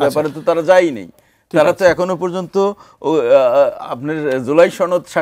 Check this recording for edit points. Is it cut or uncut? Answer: uncut